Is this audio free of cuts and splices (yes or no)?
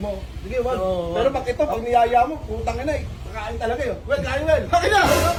yes